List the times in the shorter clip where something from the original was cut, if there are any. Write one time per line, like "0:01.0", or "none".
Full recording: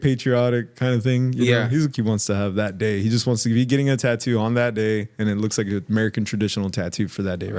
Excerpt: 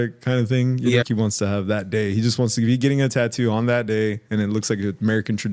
0:01.0